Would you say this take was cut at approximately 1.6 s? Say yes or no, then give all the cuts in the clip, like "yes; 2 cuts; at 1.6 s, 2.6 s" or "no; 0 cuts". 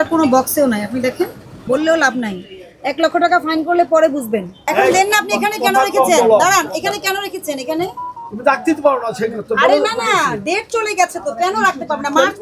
yes; 2 cuts; at 1.6 s, 4.7 s